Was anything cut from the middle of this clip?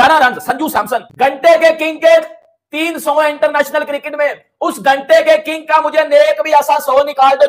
yes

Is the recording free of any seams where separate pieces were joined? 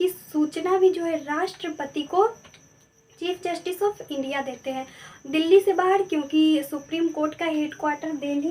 yes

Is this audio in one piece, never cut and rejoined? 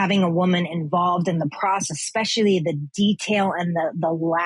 yes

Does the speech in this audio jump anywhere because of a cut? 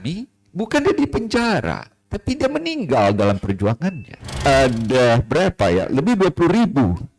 yes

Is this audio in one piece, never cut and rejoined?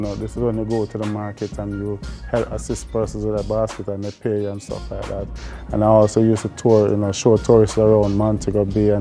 yes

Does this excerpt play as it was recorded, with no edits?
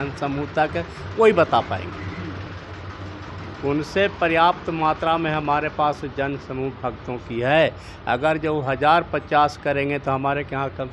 yes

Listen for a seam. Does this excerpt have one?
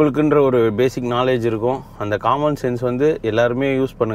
no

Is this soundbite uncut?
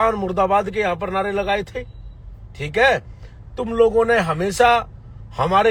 yes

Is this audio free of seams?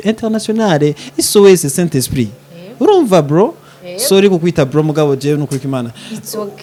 yes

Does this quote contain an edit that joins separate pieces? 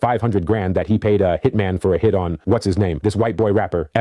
yes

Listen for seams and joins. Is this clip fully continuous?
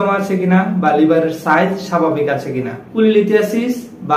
no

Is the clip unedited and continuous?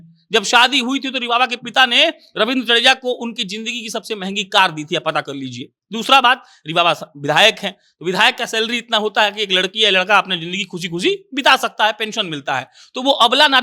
yes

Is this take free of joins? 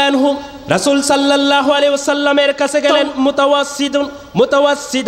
no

